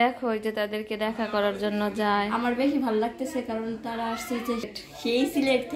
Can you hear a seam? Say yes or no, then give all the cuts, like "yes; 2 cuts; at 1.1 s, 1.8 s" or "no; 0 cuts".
yes; 1 cut; at 4.7 s